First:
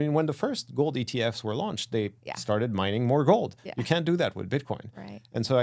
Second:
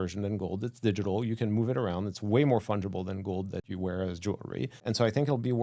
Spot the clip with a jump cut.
second; 2 cuts; at 3.7 s, 4.8 s

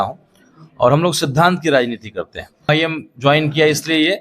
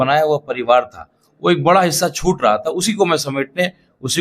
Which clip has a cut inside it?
first; 1 cut; at 2.7 s

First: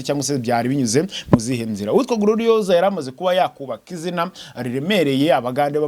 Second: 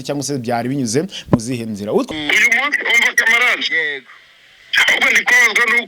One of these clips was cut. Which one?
second; 1 cut; at 2.1 s

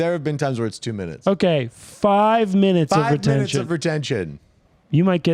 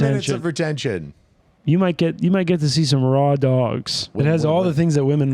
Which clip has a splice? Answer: second; 1 cut; at 4.1 s

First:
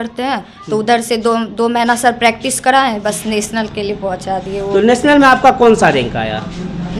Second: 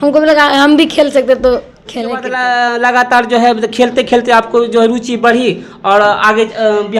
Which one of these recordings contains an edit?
second; 1 cut; at 2.3 s

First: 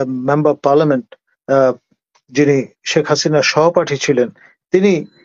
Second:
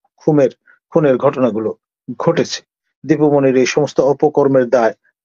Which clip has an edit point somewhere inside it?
second; 1 cut; at 2.9 s

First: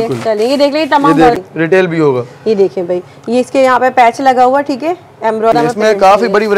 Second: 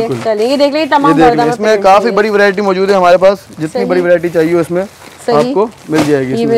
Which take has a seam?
first; 2 cuts; at 1.4 s, 5.5 s

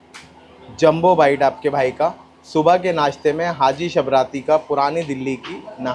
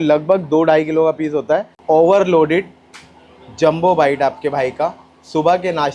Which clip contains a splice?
second; 1 cut; at 1.8 s

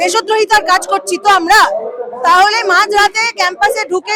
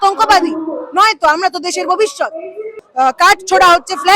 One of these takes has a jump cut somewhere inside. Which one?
second; 1 cut; at 2.8 s

